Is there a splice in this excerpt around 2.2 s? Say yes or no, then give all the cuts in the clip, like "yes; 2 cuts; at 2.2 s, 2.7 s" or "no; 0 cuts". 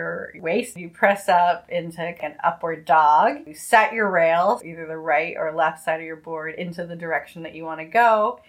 yes; 4 cuts; at 0.7 s, 2.2 s, 3.5 s, 4.6 s